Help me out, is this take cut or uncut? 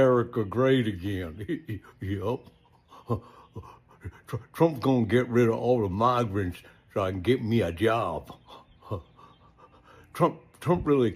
uncut